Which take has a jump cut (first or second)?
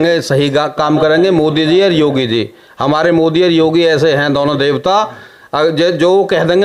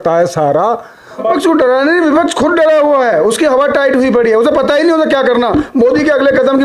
second